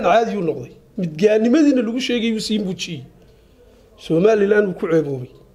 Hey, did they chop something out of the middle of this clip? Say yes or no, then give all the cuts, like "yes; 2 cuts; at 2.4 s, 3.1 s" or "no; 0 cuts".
no; 0 cuts